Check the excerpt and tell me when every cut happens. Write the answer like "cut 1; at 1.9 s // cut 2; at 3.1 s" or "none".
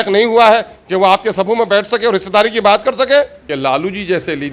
cut 1; at 3.4 s